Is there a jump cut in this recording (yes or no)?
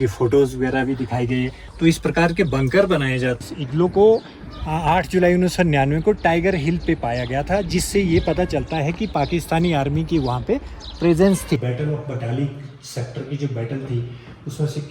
yes